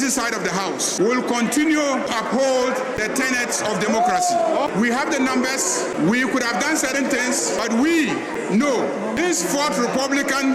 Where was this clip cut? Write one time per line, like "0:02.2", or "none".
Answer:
0:00.9
0:02.1
0:03.0
0:04.5
0:05.9
0:07.6
0:09.2